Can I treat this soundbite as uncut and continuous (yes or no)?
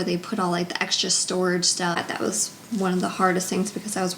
no